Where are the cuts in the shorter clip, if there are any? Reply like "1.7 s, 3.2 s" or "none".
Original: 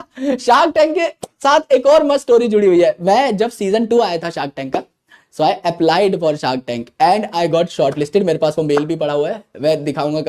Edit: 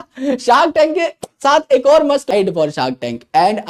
2.3 s